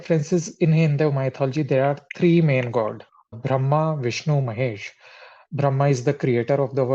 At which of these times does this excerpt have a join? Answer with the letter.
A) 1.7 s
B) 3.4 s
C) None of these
B